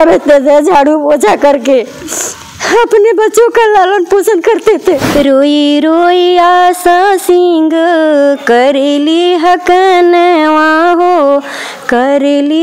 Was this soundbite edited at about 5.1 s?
yes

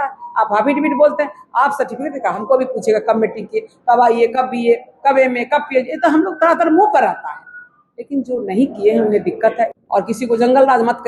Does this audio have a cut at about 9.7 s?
yes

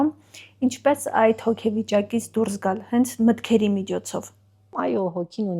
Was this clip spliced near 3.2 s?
no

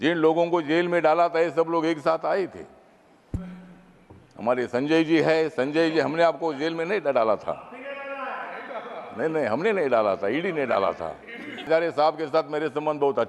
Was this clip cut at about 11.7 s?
yes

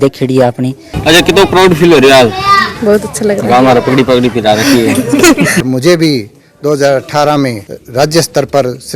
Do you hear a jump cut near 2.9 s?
no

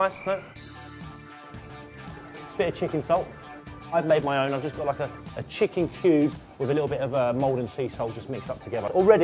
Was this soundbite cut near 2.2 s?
no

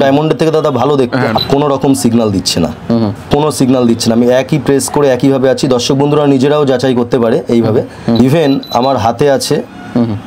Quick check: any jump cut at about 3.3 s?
yes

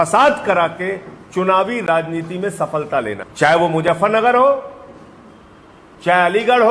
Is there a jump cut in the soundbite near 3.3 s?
yes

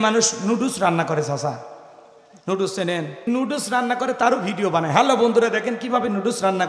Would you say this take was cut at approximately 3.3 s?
yes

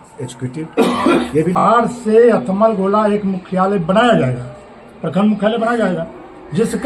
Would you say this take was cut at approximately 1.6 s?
yes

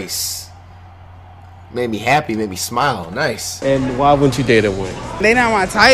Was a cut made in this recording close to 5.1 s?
yes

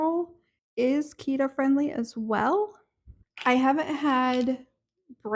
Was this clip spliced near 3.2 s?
yes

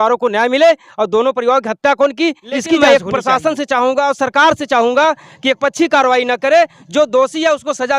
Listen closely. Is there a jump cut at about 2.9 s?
yes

